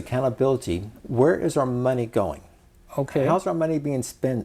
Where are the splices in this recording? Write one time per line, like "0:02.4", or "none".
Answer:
0:01.0